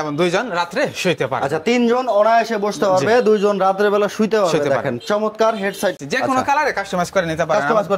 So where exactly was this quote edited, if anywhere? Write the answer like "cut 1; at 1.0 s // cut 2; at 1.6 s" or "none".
cut 1; at 6.0 s

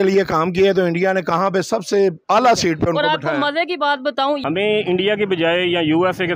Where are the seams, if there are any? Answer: cut 1; at 4.4 s

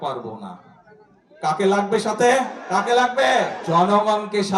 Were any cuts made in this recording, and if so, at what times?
cut 1; at 2.6 s // cut 2; at 3.6 s

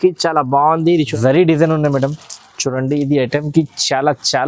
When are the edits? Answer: cut 1; at 1.1 s

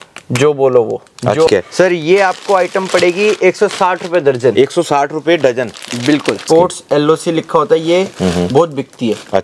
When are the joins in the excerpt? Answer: cut 1; at 1.5 s // cut 2; at 6.4 s

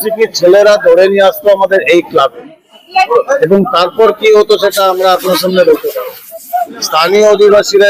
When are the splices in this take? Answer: cut 1; at 6.7 s

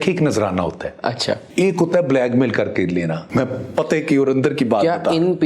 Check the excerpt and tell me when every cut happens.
cut 1; at 1.5 s // cut 2; at 3.2 s

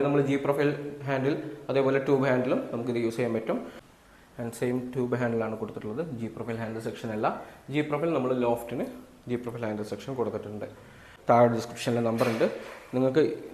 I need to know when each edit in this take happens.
cut 1; at 3.8 s // cut 2; at 11.1 s

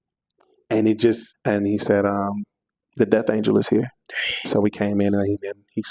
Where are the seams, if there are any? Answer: cut 1; at 1.4 s

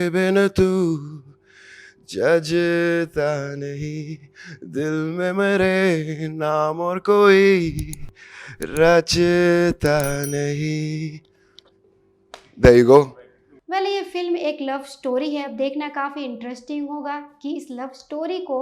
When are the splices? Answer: none

